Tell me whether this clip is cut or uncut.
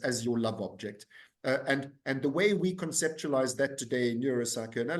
uncut